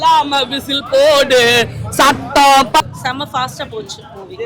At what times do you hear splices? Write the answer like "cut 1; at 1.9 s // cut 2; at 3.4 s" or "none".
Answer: cut 1; at 2.8 s